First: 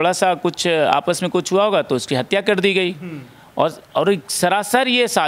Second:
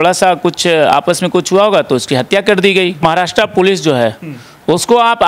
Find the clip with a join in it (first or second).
second